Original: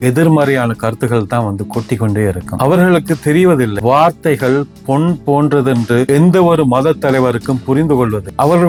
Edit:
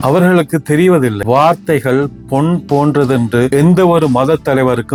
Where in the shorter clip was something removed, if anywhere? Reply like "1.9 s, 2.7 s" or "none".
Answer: none